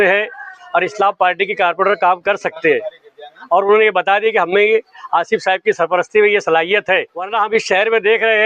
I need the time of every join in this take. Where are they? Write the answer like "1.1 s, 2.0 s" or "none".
7.2 s

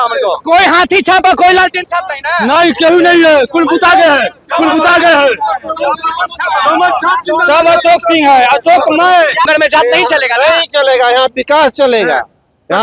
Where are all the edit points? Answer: 9.5 s

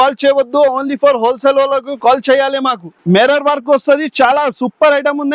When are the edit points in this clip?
1.9 s, 2.8 s

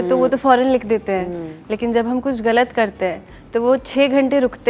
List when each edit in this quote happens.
none

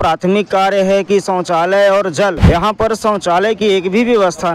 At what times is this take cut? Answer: 2.4 s

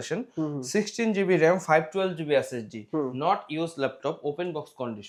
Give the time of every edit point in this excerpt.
none

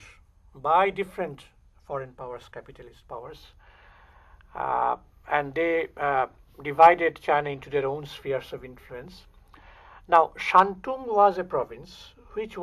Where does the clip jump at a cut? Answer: 2.8 s

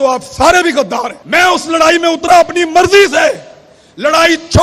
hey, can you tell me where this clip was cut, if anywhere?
1.2 s

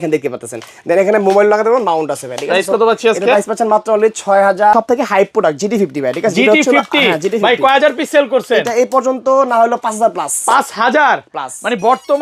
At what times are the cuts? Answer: 4.7 s

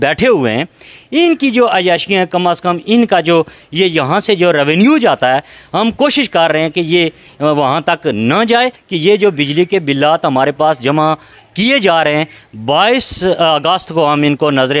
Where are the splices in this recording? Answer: 8.8 s

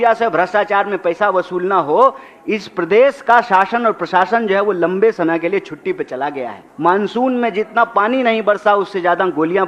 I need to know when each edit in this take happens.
6.6 s

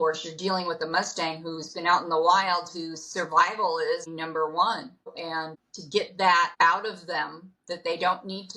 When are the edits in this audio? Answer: 4.1 s, 5.1 s

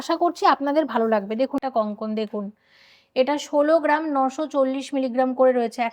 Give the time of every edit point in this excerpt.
1.6 s

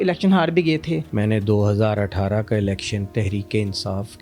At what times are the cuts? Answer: 1.0 s

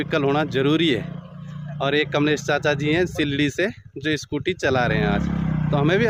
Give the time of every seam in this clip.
none

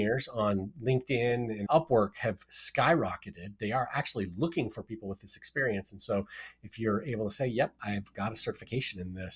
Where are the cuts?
1.6 s

